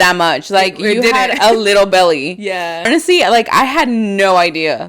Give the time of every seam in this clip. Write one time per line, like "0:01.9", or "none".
0:02.9